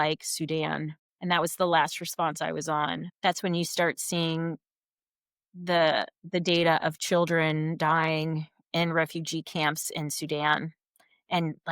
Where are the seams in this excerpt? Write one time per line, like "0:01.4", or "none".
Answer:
0:01.0
0:03.1